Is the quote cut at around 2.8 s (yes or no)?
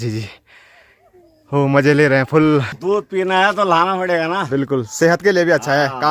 yes